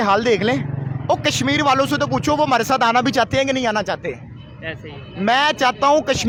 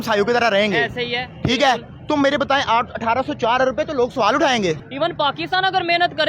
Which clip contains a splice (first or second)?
second